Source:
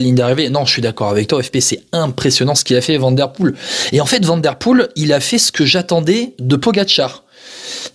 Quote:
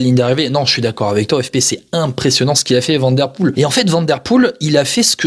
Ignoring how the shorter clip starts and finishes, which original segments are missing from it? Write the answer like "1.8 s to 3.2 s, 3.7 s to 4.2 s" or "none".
3.5 s to 3.9 s